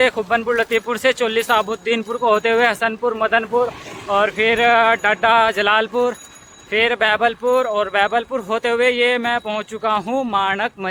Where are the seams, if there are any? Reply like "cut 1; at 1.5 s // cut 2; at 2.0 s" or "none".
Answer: none